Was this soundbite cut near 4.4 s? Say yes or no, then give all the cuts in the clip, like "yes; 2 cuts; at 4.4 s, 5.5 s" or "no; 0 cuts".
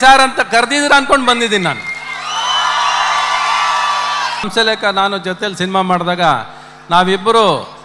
yes; 1 cut; at 4.4 s